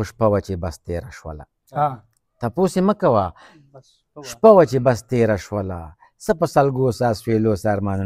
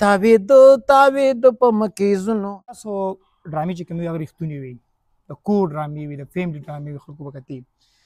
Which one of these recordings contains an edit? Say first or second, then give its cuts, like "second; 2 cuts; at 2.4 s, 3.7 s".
second; 1 cut; at 2.9 s